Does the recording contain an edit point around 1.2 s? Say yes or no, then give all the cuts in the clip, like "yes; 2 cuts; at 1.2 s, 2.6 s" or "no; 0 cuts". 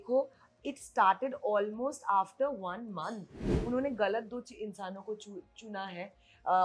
no; 1 cut; at 3.5 s